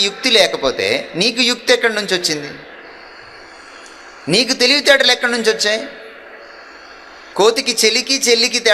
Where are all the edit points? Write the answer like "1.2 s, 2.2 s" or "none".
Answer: 7.2 s